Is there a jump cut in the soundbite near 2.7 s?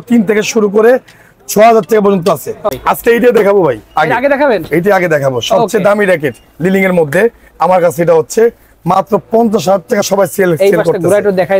yes; 1 cut; at 2.7 s

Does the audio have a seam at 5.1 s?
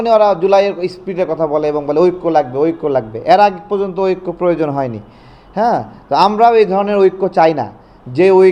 no; 0 cuts

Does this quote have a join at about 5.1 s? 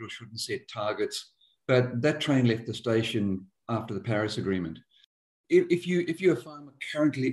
yes; 1 cut; at 5.1 s

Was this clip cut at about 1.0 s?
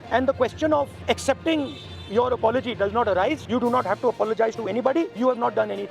yes; 3 cuts; at 1.0 s, 3.4 s, 5.1 s

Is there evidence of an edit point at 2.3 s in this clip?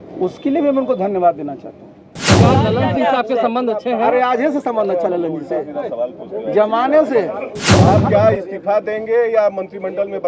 yes; 2 cuts; at 2.3 s, 7.7 s

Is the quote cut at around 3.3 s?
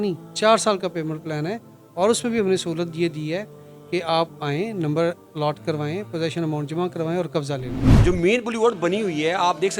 no; 1 cut; at 7.8 s

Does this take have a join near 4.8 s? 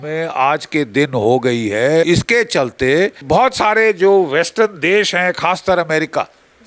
no; 2 cuts; at 2.1 s, 3.2 s

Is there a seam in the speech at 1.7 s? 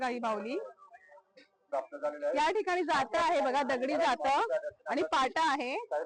yes; 1 cut; at 1.7 s

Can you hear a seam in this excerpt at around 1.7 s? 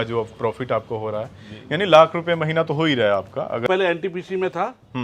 no; 1 cut; at 3.6 s

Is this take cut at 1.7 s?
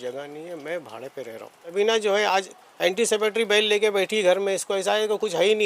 yes; 1 cut; at 1.7 s

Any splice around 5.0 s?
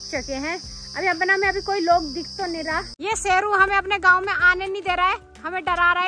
no; 1 cut; at 2.9 s

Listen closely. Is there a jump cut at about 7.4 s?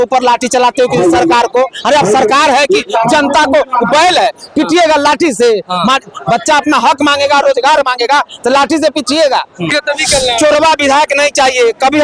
no; 1 cut; at 9.7 s

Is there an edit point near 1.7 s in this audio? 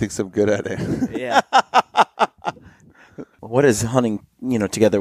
no; 1 cut; at 3.4 s

